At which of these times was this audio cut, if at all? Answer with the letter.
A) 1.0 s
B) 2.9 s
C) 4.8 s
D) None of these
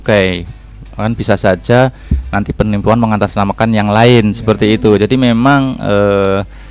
D